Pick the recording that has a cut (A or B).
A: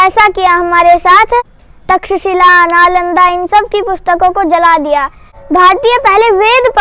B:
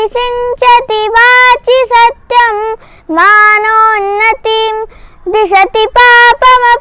A